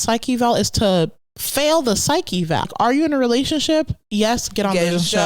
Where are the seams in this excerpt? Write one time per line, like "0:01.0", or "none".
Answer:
0:02.7